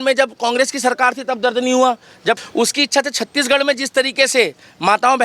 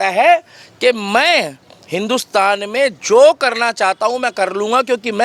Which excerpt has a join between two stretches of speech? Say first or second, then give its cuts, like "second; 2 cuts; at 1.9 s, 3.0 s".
first; 1 cut; at 2.4 s